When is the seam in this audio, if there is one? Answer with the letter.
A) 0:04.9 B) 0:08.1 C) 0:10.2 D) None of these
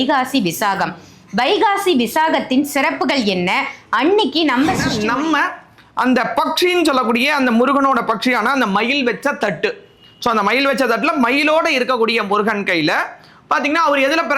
A